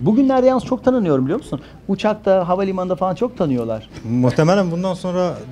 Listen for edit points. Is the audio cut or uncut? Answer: cut